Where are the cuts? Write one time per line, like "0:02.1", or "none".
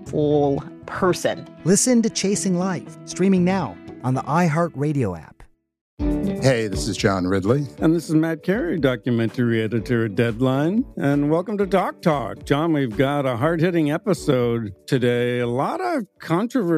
none